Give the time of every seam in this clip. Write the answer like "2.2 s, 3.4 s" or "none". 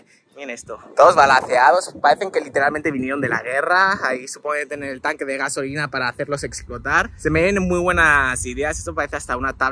none